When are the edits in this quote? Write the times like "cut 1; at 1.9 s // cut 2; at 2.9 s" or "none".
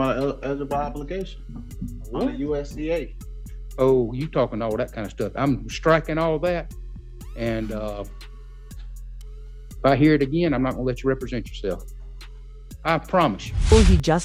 none

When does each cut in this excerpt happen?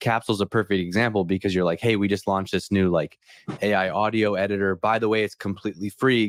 none

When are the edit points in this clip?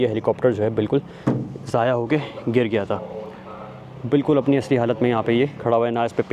none

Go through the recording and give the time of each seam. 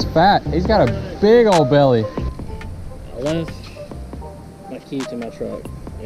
cut 1; at 2.3 s

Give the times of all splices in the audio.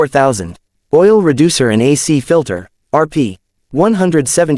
none

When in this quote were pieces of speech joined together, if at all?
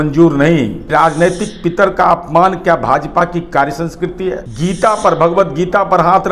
cut 1; at 0.9 s // cut 2; at 4.5 s

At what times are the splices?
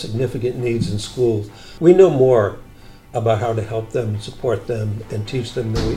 cut 1; at 1.7 s

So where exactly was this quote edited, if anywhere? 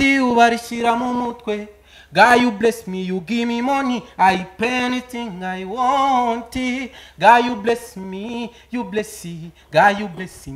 none

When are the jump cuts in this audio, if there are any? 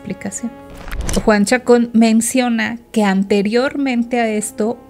cut 1; at 1.1 s

